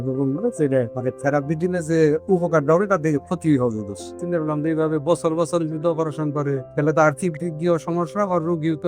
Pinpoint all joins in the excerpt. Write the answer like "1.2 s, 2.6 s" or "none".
0.9 s, 4.2 s, 6.7 s